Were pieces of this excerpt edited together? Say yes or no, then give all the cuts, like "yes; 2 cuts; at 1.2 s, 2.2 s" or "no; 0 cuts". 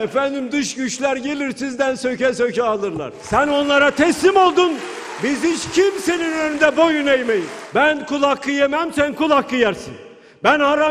yes; 2 cuts; at 3.1 s, 7.6 s